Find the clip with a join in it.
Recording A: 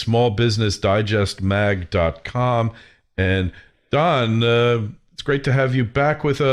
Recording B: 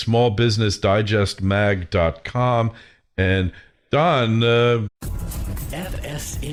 A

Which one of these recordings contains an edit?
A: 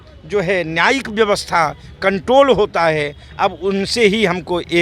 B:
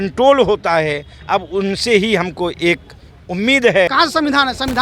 B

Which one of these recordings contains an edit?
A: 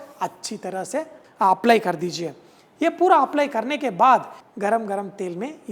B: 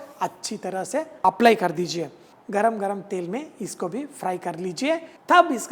B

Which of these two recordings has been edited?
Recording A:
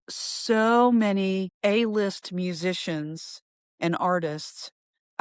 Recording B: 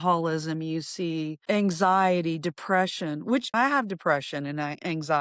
A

